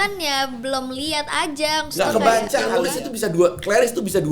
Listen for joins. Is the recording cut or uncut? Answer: cut